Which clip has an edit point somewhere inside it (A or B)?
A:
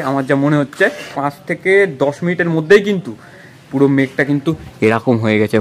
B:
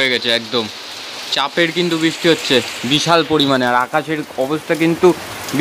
A